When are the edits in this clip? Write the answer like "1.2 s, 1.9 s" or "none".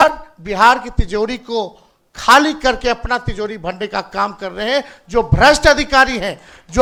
none